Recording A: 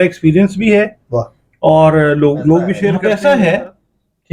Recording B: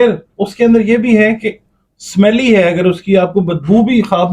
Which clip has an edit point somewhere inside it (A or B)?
A